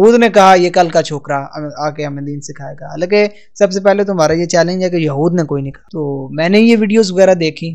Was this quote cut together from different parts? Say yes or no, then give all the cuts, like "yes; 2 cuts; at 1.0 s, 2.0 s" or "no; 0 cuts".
yes; 1 cut; at 5.8 s